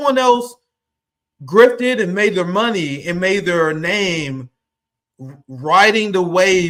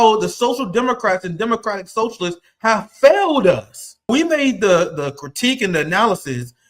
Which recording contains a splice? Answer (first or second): second